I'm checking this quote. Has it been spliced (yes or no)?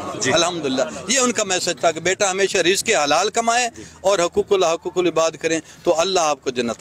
no